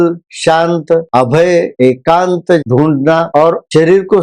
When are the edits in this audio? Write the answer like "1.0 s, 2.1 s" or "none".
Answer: 2.6 s